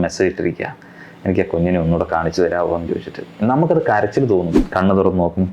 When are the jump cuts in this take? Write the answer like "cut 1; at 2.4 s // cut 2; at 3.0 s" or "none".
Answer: cut 1; at 4.6 s